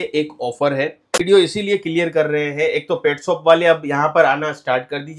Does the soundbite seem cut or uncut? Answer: cut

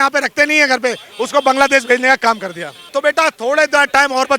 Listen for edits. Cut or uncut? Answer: cut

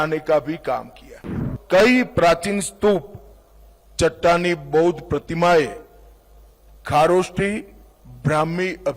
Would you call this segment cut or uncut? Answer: cut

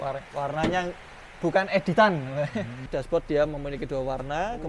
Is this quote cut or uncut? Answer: cut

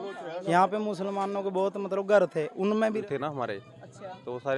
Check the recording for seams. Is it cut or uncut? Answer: cut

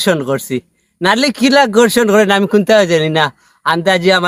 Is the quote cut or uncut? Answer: uncut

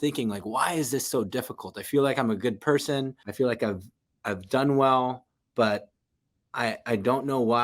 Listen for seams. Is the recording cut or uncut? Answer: cut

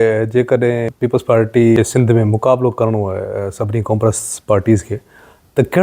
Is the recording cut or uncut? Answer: cut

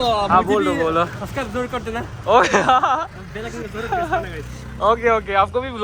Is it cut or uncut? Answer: uncut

